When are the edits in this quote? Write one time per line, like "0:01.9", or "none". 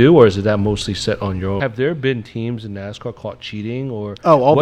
0:01.6